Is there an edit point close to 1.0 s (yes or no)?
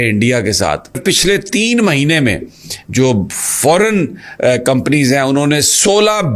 yes